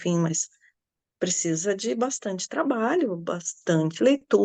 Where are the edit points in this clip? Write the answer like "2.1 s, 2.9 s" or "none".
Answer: none